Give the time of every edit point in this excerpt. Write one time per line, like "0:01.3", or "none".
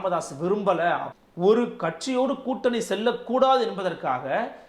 0:01.2